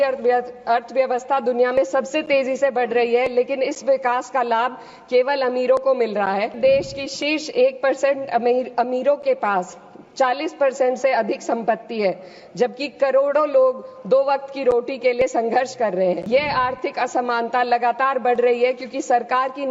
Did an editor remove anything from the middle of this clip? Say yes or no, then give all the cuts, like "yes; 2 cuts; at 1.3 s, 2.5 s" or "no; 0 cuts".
yes; 2 cuts; at 6.5 s, 16.2 s